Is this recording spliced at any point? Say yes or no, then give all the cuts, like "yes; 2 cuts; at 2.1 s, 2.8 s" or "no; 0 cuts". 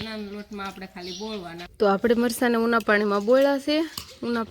yes; 1 cut; at 1.6 s